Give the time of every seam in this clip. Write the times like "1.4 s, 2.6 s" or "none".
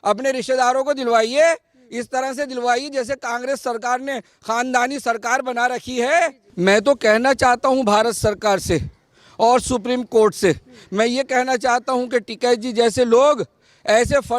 6.4 s